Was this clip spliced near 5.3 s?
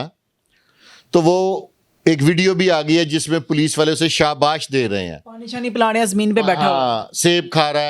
no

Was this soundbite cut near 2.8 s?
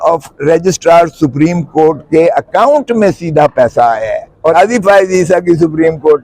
no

